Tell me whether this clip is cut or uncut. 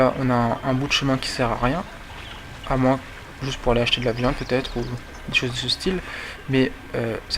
cut